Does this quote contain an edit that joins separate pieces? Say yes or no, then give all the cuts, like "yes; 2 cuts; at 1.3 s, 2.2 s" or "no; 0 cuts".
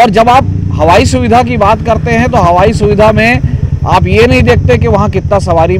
no; 0 cuts